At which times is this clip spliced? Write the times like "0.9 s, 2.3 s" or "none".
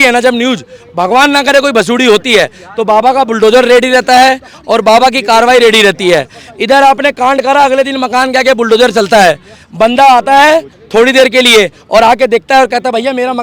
none